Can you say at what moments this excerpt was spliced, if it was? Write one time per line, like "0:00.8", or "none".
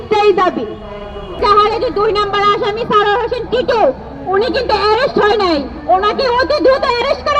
0:01.4